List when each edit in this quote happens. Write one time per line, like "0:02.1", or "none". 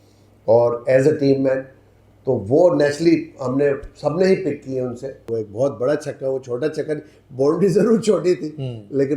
0:05.2